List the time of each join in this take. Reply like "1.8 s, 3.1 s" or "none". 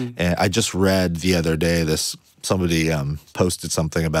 2.2 s